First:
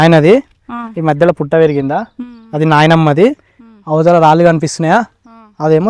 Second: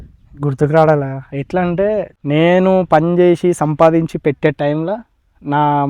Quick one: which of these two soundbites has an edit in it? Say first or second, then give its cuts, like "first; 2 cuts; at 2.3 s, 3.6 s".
second; 1 cut; at 2.1 s